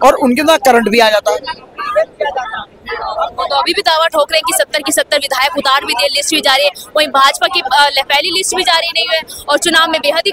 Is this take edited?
no; 0 cuts

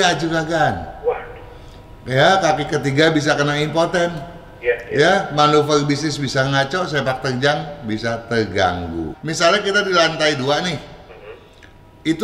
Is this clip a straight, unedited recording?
no; 1 cut; at 9.2 s

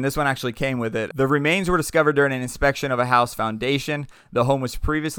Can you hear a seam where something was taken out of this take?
yes; 1 cut; at 1.1 s

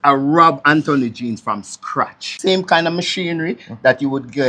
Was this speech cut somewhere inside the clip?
yes; 1 cut; at 2.3 s

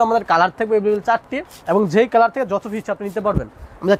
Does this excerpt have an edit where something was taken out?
no; 0 cuts

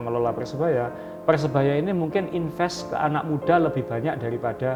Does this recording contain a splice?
no; 0 cuts

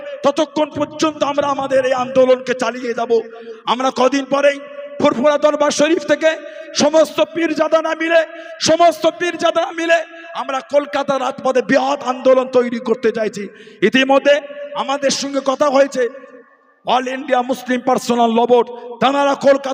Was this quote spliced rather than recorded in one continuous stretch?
no; 0 cuts

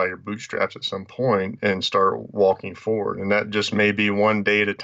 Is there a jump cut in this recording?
no; 0 cuts

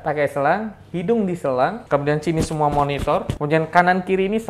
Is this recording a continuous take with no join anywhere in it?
no; 2 cuts; at 1.8 s, 3.3 s

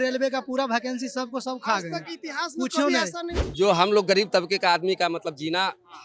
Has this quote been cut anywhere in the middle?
yes; 1 cut; at 3.3 s

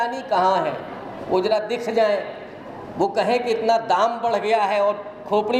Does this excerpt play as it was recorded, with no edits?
yes; 0 cuts

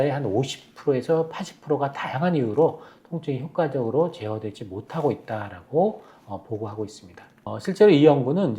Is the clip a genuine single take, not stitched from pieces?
no; 1 cut; at 7.5 s

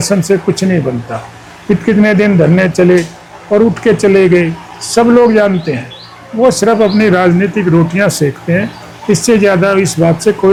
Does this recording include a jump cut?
no; 0 cuts

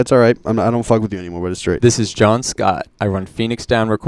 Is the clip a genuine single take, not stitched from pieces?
no; 1 cut; at 2.9 s

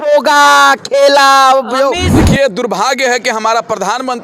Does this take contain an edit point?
yes; 1 cut; at 2.1 s

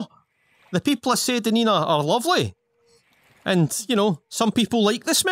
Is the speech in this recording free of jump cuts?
yes; 0 cuts

